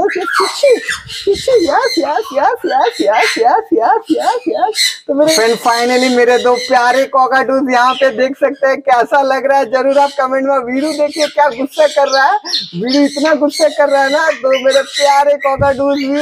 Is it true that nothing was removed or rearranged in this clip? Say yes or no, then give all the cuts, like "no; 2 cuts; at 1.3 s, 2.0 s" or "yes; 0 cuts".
no; 1 cut; at 5.2 s